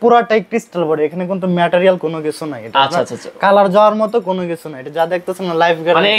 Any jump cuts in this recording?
no; 0 cuts

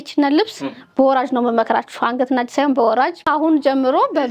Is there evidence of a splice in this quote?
yes; 1 cut; at 3.2 s

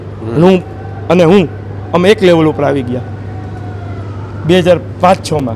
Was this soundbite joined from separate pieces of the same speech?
no; 0 cuts

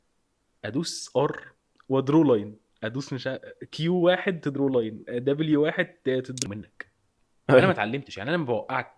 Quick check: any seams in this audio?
yes; 1 cut; at 6.4 s

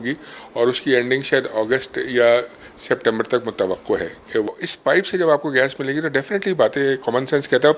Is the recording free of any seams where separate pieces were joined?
no; 1 cut; at 4.5 s

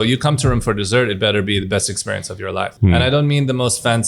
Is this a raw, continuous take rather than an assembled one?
no; 1 cut; at 2.7 s

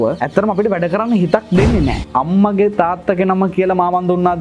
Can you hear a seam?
yes; 1 cut; at 2.0 s

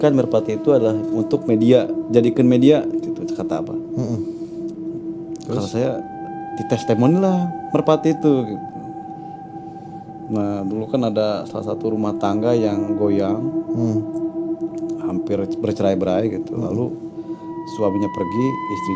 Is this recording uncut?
yes; 0 cuts

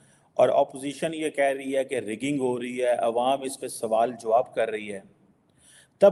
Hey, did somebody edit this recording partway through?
no; 0 cuts

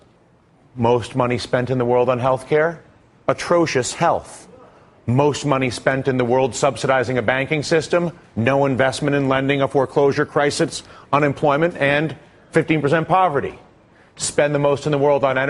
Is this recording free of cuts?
yes; 0 cuts

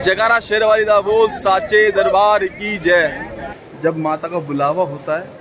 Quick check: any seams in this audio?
yes; 1 cut; at 3.4 s

